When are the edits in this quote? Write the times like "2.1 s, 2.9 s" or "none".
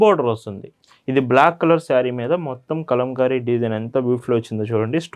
none

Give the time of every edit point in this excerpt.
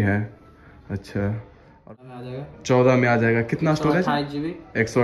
1.9 s

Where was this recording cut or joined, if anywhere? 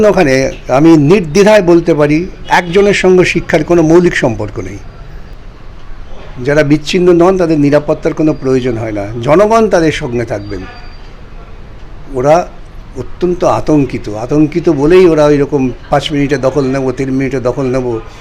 5.3 s

